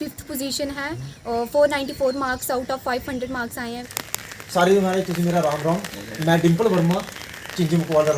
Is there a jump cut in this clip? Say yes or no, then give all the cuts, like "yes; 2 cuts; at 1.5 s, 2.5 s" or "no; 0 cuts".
yes; 1 cut; at 3.8 s